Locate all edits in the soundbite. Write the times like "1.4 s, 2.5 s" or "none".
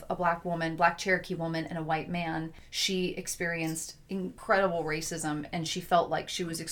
4.4 s